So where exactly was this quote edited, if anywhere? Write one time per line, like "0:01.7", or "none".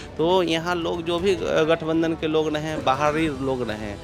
none